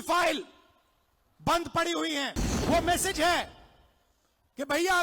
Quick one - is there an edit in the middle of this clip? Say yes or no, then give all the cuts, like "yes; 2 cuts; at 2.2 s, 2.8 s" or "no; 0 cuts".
yes; 1 cut; at 2.5 s